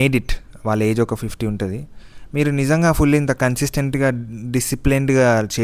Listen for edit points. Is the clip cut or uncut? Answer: uncut